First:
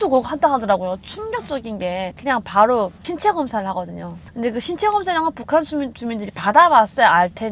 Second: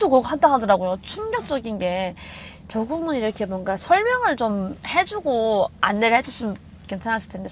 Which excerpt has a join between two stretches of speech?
first; 1 cut; at 2.2 s

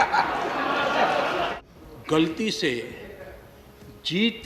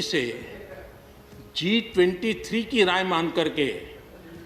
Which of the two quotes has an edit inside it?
first; 1 cut; at 1.5 s

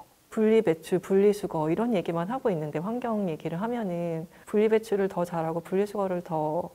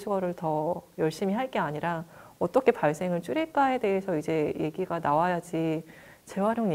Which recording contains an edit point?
first; 1 cut; at 4.3 s

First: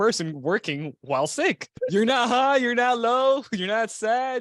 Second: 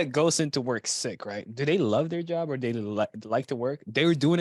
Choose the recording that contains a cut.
first; 1 cut; at 1.7 s

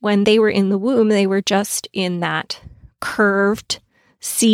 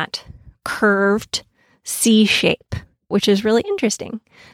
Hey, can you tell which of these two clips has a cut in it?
second; 1 cut; at 3.1 s

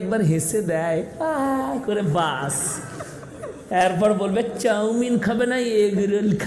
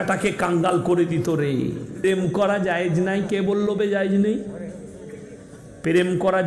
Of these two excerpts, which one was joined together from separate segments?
second; 1 cut; at 2.0 s

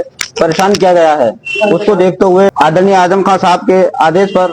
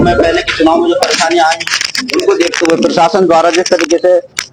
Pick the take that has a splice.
first; 1 cut; at 2.5 s

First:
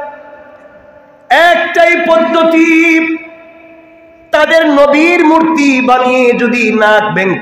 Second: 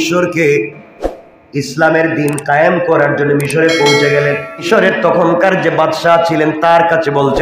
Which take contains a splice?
second; 1 cut; at 4.6 s

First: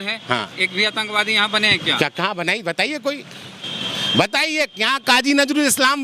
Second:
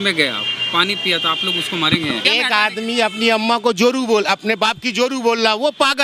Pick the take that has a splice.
second; 1 cut; at 2.2 s

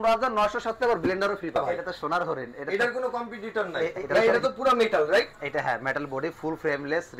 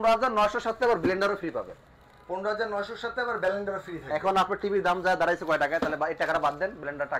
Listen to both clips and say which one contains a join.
first; 2 cuts; at 1.6 s, 4.0 s

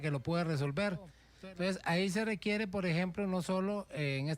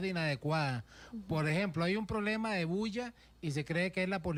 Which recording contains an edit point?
first; 1 cut; at 1.2 s

